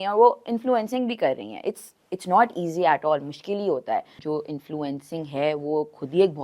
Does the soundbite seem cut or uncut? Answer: cut